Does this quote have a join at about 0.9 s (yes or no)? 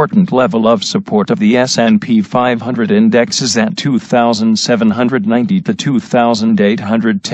yes